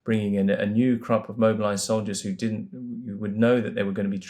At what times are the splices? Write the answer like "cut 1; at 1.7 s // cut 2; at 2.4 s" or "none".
none